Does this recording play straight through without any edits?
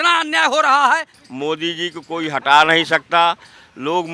no; 1 cut; at 1.2 s

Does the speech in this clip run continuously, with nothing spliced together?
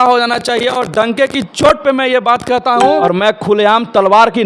no; 1 cut; at 3.0 s

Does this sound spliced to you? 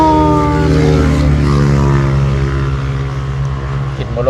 no; 0 cuts

